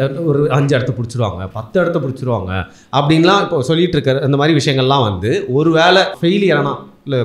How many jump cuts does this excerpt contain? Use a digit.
1